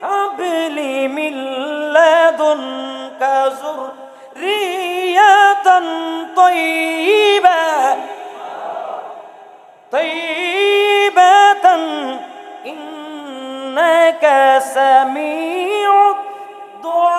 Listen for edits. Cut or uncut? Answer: uncut